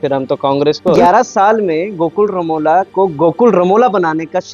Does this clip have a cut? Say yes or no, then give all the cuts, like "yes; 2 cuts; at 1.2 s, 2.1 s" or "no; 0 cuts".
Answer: yes; 1 cut; at 1.0 s